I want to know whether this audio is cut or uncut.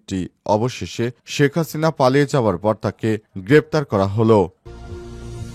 cut